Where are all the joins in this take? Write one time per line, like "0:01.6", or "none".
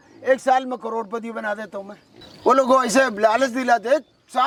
none